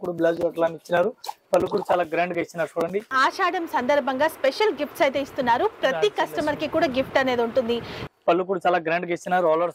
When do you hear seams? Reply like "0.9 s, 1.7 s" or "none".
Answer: 3.2 s, 8.0 s